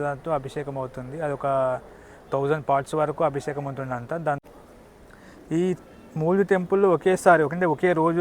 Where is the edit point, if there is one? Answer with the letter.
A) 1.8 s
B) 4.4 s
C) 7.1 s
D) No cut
B